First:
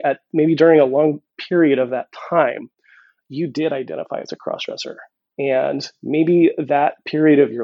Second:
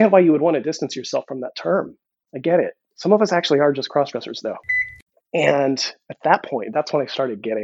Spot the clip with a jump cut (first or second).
second